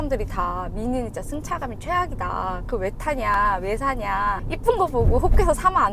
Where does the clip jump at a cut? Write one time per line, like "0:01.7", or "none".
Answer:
none

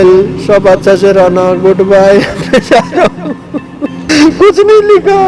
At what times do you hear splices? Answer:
0:04.1

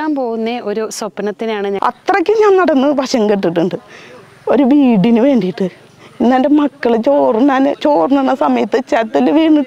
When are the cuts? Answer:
0:01.8

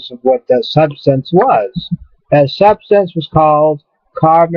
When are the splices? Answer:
0:01.2

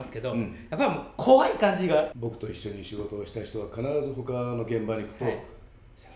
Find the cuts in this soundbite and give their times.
0:02.1

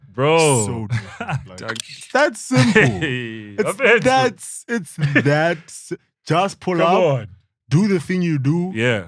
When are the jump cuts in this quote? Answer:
0:01.9

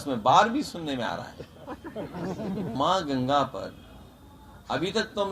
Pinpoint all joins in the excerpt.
0:02.7

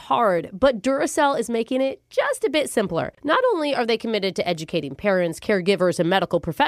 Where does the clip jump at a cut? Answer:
none

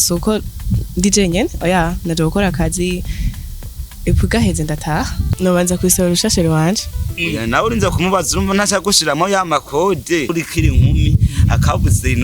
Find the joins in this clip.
0:05.2
0:10.3

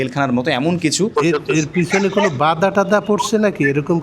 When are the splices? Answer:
0:01.1

